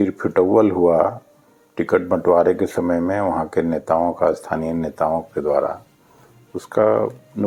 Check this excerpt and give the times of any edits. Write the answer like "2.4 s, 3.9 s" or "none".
none